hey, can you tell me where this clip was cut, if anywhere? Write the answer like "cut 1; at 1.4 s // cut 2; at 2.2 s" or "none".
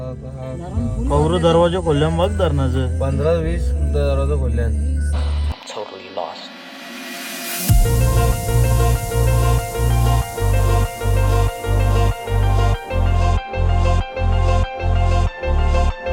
none